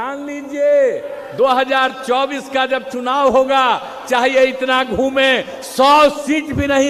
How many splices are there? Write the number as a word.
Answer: zero